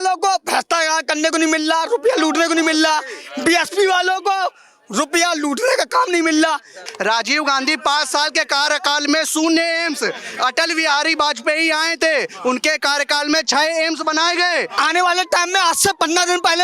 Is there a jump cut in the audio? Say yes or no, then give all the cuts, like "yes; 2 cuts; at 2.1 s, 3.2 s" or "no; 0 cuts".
yes; 2 cuts; at 6.8 s, 14.7 s